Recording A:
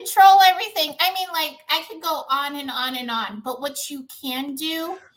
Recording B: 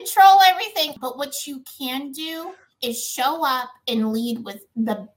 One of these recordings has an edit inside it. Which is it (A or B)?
B